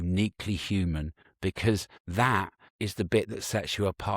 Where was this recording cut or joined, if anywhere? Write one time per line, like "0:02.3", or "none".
0:01.5
0:02.6